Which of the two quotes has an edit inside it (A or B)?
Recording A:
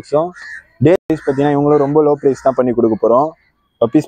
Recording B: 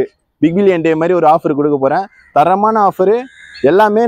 A